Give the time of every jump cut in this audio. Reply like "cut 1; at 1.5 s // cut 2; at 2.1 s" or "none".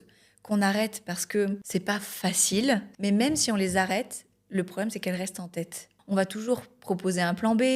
cut 1; at 1.6 s // cut 2; at 2.9 s // cut 3; at 5.9 s